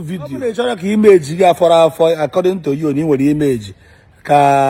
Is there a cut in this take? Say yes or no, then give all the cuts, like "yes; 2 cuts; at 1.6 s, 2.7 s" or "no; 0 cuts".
no; 0 cuts